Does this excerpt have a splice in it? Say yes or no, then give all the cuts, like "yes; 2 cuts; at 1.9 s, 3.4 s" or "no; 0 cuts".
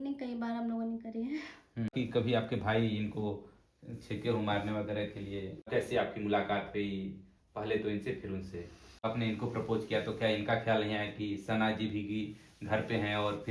yes; 3 cuts; at 1.9 s, 5.7 s, 9.0 s